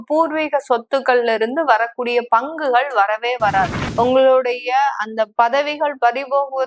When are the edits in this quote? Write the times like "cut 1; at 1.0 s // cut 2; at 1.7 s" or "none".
cut 1; at 3.8 s